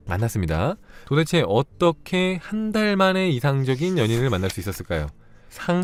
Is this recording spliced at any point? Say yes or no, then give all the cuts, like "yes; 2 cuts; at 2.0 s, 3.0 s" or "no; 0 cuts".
no; 0 cuts